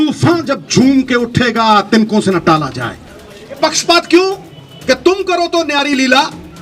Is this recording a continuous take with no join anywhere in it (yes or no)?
no